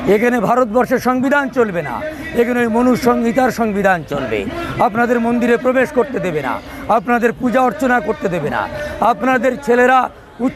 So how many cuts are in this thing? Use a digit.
0